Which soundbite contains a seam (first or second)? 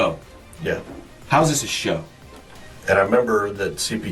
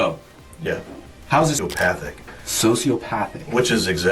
second